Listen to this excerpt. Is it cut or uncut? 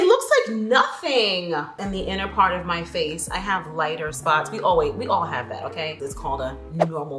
cut